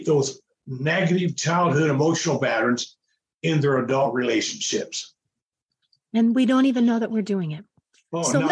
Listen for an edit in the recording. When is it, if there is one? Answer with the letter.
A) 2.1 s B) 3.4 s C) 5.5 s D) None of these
D